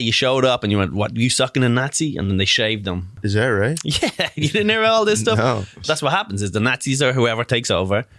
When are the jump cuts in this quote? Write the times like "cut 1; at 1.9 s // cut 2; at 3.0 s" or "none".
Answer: cut 1; at 3.2 s // cut 2; at 5.8 s

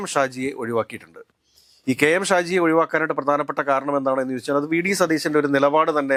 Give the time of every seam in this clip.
none

